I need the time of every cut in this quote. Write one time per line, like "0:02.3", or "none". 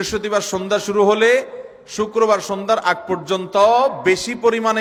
none